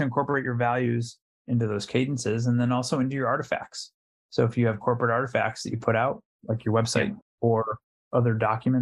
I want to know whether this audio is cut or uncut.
uncut